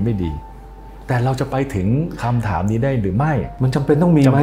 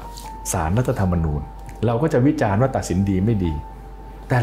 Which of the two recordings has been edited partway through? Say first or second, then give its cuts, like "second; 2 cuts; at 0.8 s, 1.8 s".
first; 1 cut; at 3.5 s